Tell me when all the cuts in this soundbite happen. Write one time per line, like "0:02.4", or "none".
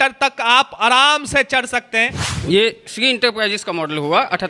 0:02.2